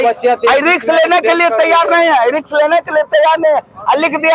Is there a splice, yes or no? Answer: no